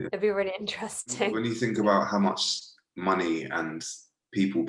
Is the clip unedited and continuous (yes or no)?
no